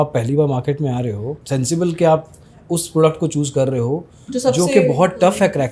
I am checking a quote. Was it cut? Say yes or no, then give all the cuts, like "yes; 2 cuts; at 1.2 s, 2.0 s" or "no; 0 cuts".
yes; 1 cut; at 1.4 s